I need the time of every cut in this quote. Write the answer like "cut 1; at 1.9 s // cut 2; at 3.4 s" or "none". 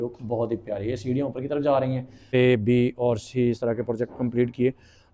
cut 1; at 2.3 s